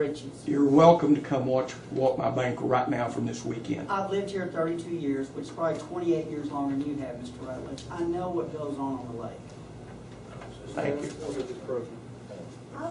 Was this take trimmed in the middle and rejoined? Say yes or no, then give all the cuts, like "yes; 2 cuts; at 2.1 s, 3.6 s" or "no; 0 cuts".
yes; 1 cut; at 11.4 s